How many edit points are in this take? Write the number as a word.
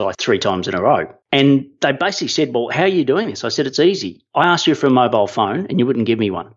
one